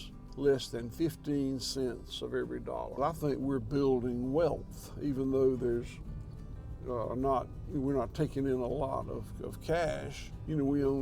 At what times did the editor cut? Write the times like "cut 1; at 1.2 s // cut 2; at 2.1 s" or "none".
cut 1; at 3.0 s